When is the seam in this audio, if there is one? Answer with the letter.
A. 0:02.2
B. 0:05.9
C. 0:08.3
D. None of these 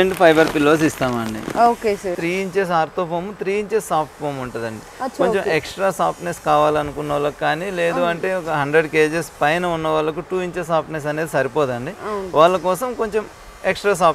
A